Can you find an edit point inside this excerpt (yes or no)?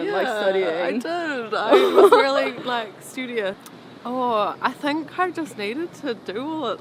yes